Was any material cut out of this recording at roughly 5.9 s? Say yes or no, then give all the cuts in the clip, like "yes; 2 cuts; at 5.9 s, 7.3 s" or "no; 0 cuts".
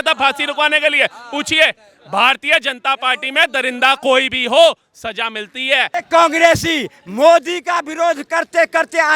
yes; 1 cut; at 5.9 s